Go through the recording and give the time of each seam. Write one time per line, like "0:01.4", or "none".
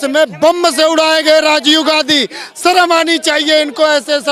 none